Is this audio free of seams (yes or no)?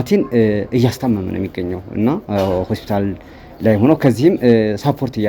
yes